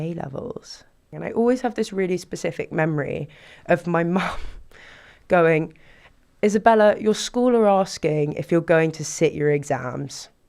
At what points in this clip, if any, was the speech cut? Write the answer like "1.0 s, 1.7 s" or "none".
1.1 s